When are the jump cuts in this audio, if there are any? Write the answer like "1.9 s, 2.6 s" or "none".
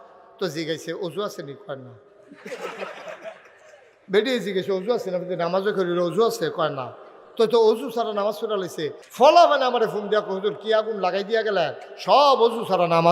9.0 s